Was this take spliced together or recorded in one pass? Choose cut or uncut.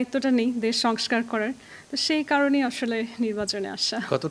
uncut